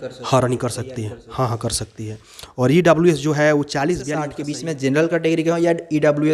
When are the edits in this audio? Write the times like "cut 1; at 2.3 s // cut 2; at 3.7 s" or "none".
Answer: cut 1; at 4.4 s